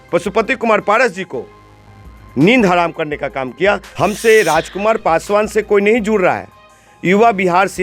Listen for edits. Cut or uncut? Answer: cut